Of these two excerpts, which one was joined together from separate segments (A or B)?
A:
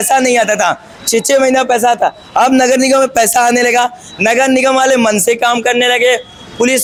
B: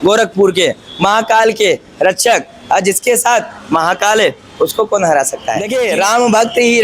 B